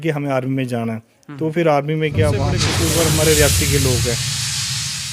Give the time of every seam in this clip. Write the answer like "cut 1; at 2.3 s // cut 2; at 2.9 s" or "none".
cut 1; at 2.6 s